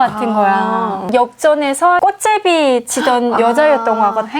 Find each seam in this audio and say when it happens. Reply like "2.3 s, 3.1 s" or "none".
1.1 s

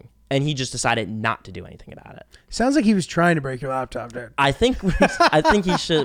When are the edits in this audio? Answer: none

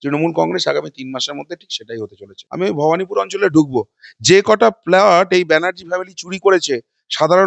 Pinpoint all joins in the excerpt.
2.4 s

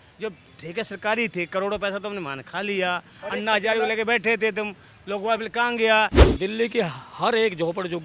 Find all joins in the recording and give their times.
6.2 s

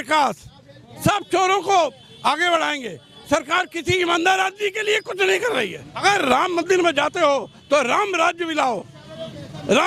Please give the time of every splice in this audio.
6.0 s

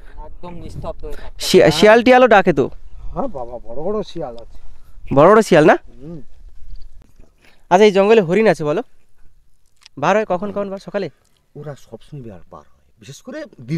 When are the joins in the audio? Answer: 7.1 s

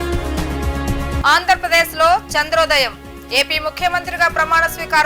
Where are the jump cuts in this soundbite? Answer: 1.2 s

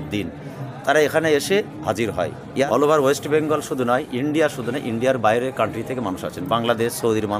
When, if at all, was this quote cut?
2.4 s

